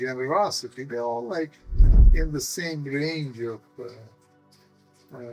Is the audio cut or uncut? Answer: uncut